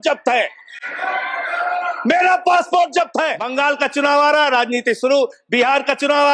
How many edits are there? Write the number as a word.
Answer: one